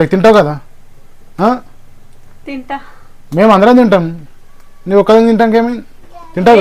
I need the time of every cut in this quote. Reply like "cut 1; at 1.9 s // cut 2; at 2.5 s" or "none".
none